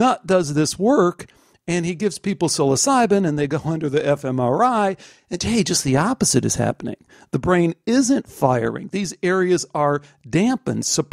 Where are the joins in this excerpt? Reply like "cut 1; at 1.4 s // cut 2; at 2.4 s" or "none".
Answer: none

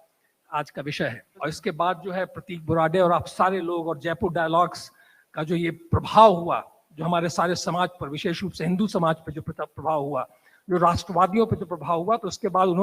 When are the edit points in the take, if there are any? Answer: cut 1; at 1.3 s

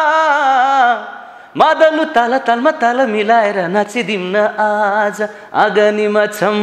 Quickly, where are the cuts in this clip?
none

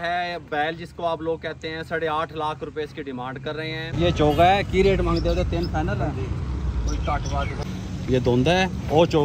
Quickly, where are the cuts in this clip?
cut 1; at 3.9 s // cut 2; at 7.7 s

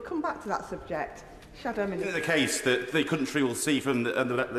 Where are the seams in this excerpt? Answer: cut 1; at 2.1 s

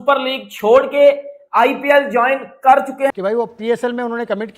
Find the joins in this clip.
cut 1; at 3.2 s

